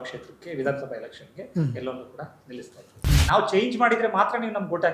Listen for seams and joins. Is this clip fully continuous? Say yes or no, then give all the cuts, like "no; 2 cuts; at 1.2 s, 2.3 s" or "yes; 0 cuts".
no; 1 cut; at 3.1 s